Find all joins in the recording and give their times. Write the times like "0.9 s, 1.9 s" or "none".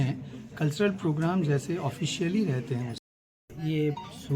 3.0 s